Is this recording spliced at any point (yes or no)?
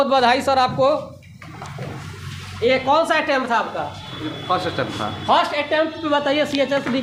no